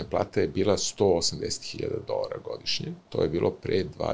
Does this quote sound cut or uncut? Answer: cut